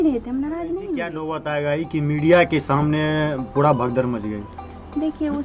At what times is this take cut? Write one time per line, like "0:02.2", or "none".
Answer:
0:01.2